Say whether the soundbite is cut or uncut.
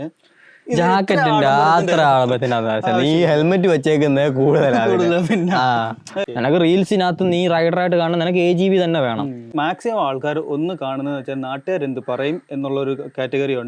cut